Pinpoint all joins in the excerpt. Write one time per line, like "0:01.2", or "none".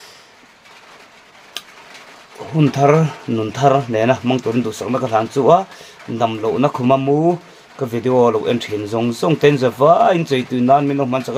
none